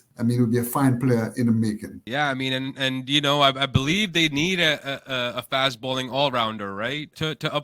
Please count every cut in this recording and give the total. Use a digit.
0